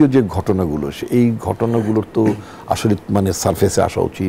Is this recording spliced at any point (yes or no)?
no